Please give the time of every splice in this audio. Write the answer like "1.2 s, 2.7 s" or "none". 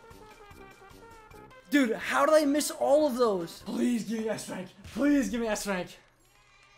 1.5 s, 3.6 s